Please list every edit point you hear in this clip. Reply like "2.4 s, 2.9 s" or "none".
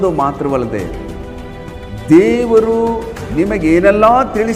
none